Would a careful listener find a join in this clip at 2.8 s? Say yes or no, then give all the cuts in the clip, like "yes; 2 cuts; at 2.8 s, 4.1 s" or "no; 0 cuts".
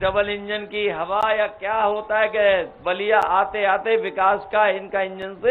no; 0 cuts